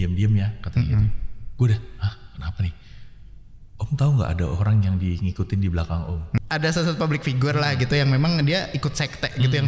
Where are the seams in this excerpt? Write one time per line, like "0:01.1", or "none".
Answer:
0:06.4

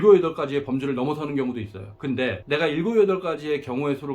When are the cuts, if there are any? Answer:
0:02.3

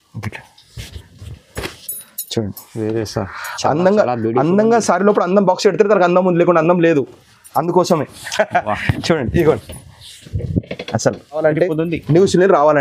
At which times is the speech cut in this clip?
0:11.4

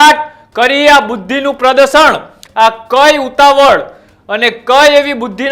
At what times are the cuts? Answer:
0:02.4

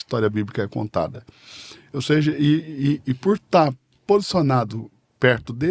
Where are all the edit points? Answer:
none

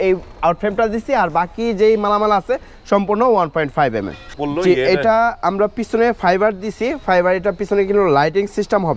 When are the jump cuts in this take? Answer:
0:04.3

